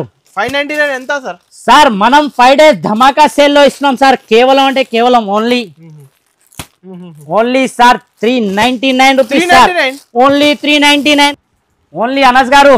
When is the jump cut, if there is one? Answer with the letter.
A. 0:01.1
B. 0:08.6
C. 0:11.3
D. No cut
C